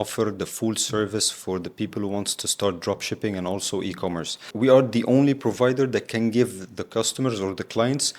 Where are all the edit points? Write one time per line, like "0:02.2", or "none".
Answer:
0:04.5